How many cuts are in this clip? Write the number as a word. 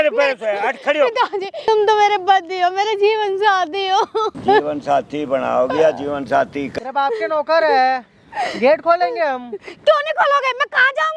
three